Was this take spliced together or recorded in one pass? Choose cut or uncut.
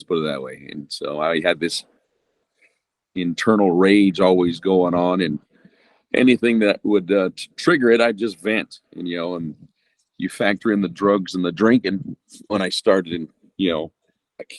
uncut